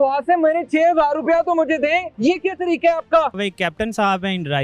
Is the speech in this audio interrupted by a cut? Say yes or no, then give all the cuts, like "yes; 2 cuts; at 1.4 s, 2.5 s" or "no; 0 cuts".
yes; 2 cuts; at 2.1 s, 3.4 s